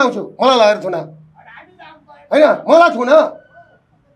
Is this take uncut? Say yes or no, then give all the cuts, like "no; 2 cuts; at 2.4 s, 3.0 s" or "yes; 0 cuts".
yes; 0 cuts